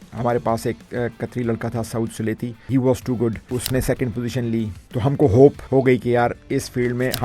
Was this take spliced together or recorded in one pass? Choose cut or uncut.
cut